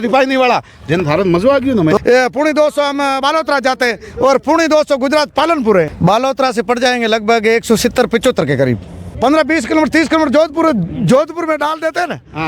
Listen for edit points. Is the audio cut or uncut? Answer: cut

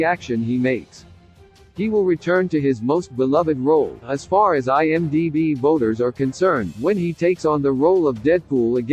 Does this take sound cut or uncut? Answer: uncut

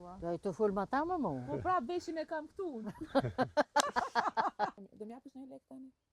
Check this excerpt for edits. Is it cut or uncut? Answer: cut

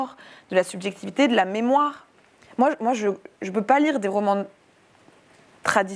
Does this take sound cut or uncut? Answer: uncut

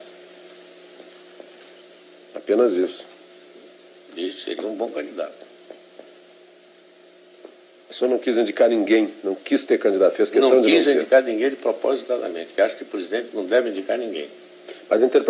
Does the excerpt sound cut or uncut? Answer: uncut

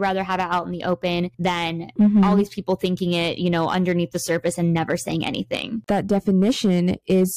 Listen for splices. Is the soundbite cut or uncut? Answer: cut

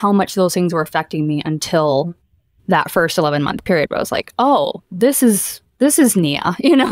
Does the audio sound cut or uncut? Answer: uncut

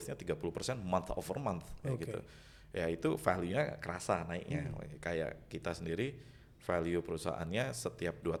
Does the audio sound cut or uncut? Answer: uncut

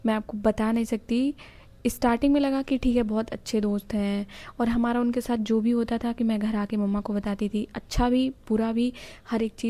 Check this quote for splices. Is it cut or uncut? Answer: uncut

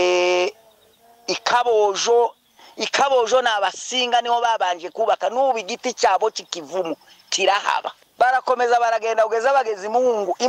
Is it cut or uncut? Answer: cut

